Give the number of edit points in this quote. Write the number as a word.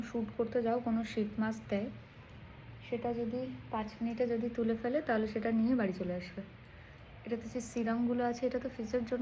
zero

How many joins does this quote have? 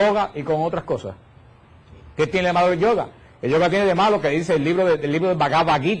one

